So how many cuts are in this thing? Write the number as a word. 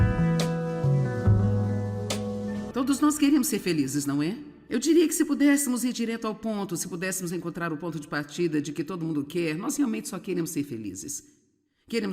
one